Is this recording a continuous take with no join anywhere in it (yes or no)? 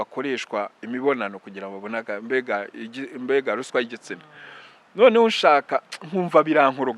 yes